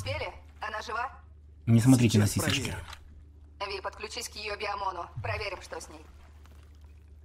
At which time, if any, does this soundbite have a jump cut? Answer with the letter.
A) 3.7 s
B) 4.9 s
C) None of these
C